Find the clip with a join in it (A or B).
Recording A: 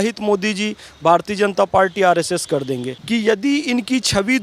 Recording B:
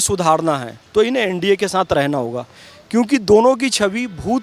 A